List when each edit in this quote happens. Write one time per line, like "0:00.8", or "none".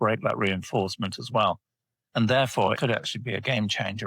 0:02.8